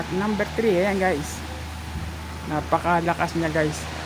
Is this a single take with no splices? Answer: yes; 0 cuts

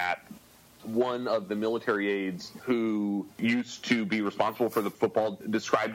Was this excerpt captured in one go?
no; 3 cuts; at 2.5 s, 3.3 s, 4.9 s

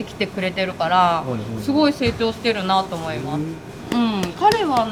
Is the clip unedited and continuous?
yes; 0 cuts

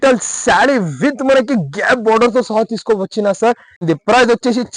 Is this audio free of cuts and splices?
no; 1 cut; at 3.8 s

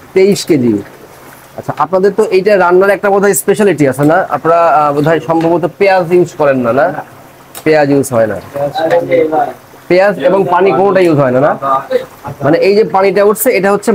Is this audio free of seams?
yes; 0 cuts

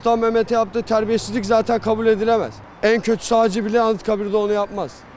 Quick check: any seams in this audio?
no; 0 cuts

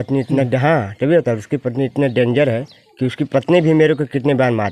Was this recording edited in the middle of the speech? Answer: no; 0 cuts

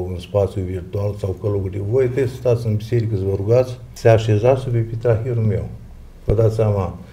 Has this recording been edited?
yes; 1 cut; at 3.8 s

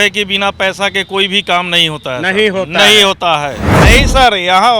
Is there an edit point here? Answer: yes; 1 cut; at 3.7 s

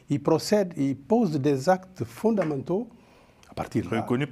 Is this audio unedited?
yes; 0 cuts

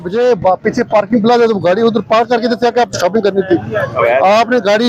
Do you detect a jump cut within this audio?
no; 0 cuts

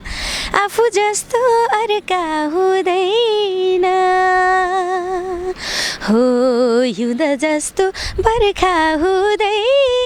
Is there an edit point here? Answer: no; 0 cuts

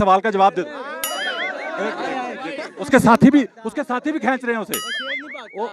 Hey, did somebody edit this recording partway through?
no; 0 cuts

